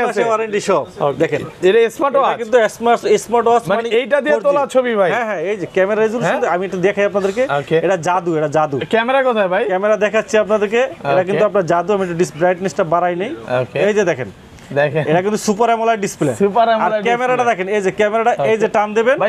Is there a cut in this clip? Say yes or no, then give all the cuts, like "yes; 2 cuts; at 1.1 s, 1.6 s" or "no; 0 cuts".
no; 0 cuts